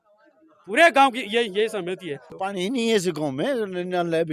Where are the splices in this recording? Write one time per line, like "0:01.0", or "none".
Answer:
0:02.2